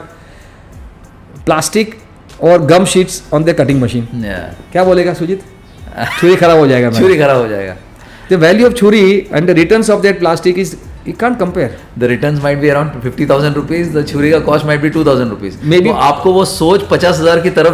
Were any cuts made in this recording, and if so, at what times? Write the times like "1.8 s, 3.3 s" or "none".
none